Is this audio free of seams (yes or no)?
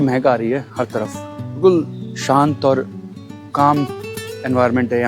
yes